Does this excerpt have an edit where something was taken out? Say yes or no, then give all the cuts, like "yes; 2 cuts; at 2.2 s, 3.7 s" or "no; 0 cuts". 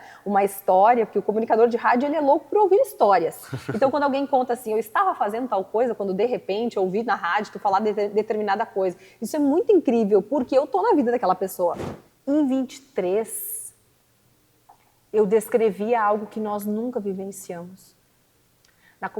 yes; 1 cut; at 11.9 s